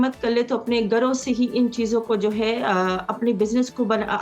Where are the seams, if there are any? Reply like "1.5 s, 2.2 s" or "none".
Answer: none